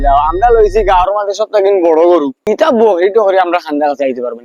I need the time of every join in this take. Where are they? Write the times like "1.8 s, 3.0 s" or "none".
2.4 s